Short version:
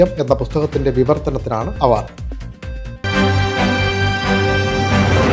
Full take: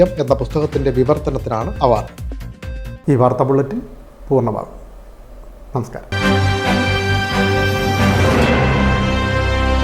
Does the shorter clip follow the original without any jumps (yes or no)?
no